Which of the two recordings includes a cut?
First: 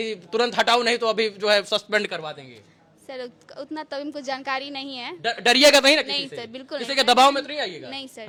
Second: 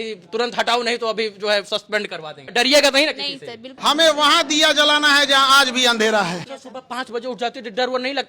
second; 3 cuts; at 2.5 s, 3.7 s, 6.3 s

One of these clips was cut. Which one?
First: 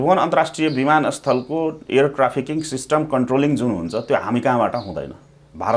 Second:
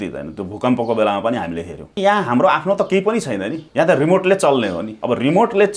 second; 3 cuts; at 2.0 s, 3.6 s, 4.9 s

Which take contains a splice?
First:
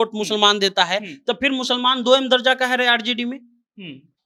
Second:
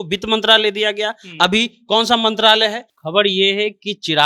second; 1 cut; at 2.9 s

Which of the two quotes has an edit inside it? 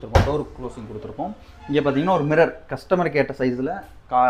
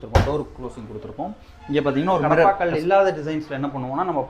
second; 1 cut; at 2.4 s

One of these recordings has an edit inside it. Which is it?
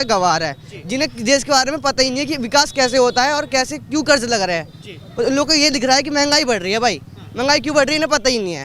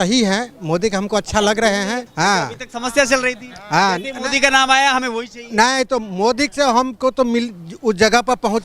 second; 1 cut; at 2.1 s

